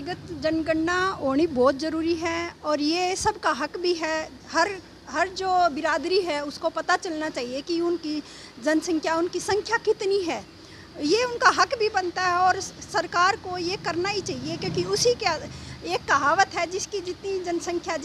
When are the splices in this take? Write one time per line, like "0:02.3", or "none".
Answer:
none

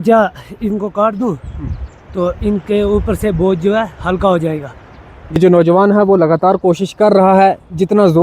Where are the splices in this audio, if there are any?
0:05.4

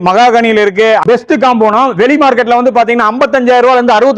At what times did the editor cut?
0:01.0

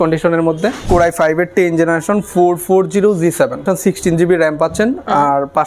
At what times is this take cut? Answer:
0:00.8
0:03.6

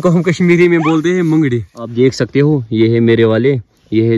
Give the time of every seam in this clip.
0:01.8

